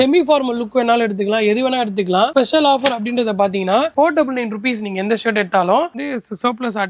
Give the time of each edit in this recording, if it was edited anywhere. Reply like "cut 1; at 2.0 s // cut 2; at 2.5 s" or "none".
cut 1; at 2.3 s // cut 2; at 3.9 s // cut 3; at 5.9 s